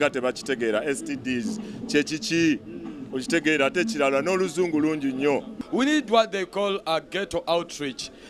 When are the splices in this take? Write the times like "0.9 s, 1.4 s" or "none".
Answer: 5.6 s